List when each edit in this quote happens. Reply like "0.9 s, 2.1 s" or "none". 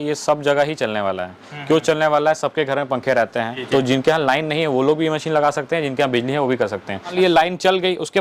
3.6 s, 7.1 s